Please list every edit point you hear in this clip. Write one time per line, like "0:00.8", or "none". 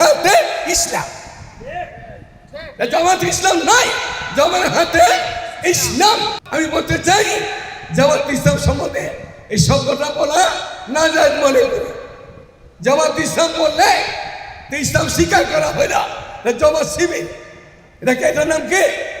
0:06.4